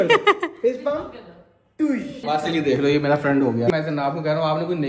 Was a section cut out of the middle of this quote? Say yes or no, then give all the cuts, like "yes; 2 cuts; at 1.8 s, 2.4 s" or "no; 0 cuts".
yes; 2 cuts; at 2.3 s, 3.7 s